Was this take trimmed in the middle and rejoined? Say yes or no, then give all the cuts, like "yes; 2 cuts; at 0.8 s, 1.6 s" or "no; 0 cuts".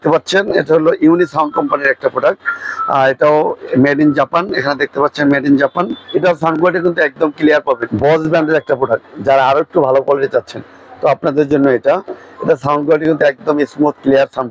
yes; 2 cuts; at 6.0 s, 7.9 s